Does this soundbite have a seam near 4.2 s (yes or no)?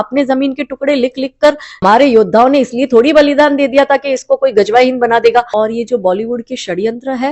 no